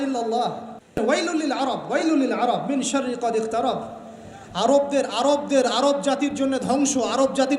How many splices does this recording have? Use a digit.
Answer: 1